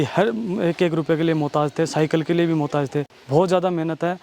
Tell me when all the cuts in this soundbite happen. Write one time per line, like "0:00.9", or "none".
0:03.2